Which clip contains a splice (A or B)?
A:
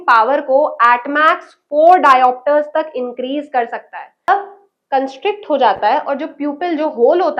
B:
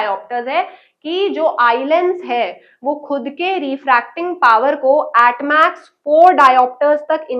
A